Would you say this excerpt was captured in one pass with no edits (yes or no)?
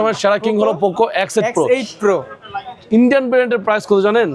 yes